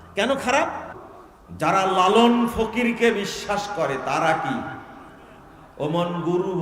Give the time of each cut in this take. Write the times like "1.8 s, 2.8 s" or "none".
1.0 s